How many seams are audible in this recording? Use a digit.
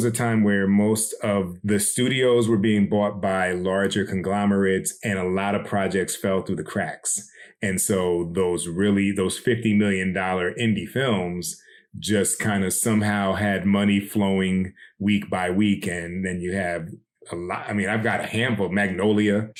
0